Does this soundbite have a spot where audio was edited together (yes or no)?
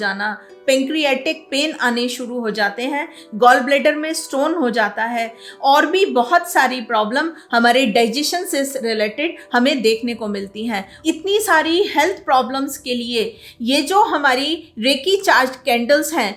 yes